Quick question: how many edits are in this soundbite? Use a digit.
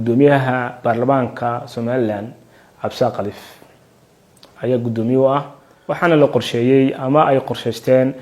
0